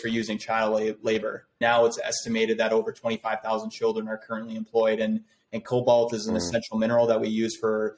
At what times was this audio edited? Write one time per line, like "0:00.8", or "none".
0:01.6